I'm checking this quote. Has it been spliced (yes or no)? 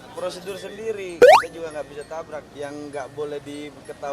yes